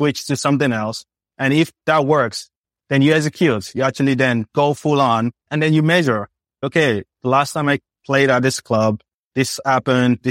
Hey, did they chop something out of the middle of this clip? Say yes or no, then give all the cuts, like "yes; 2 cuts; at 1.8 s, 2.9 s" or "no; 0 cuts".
yes; 3 cuts; at 1.8 s, 2.7 s, 5.4 s